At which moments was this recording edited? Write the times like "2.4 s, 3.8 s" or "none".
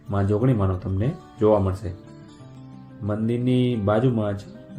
none